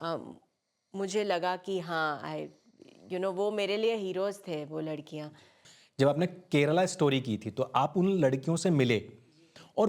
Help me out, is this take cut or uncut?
cut